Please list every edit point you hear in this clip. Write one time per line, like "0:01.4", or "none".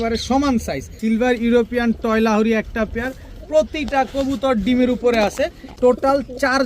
0:00.9
0:05.6

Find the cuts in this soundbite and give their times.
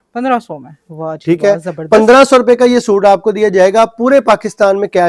none

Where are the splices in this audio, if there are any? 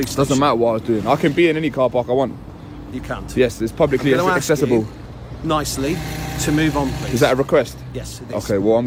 none

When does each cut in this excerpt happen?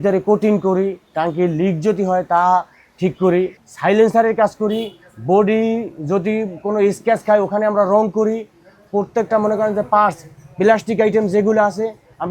0:03.6

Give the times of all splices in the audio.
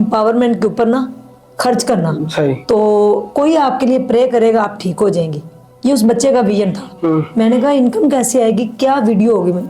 none

